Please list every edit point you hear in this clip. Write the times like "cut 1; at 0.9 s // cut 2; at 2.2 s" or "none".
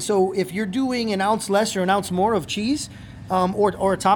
none